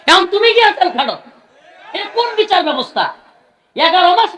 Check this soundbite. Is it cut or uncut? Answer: uncut